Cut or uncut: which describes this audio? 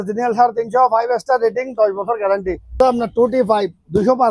cut